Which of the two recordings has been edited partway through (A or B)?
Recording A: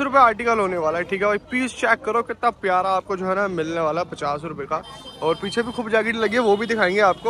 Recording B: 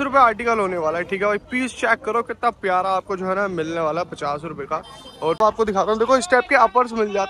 B